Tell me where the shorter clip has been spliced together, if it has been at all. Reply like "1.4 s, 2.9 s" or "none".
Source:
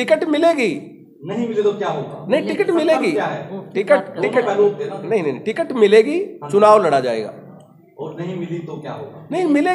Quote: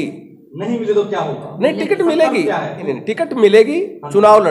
2.9 s